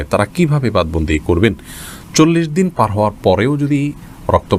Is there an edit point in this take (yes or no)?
no